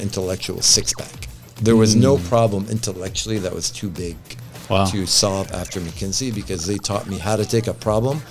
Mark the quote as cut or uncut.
uncut